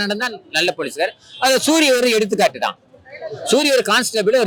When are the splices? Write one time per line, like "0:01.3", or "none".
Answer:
none